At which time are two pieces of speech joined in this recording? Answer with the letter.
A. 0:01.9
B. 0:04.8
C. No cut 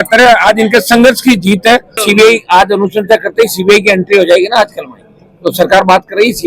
A